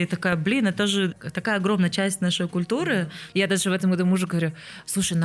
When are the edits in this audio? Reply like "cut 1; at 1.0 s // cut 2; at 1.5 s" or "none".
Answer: cut 1; at 1.2 s // cut 2; at 3.2 s